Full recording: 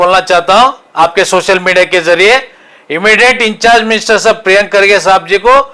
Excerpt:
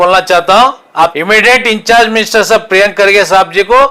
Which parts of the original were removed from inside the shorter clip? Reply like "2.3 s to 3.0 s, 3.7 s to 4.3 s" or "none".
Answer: 1.1 s to 2.9 s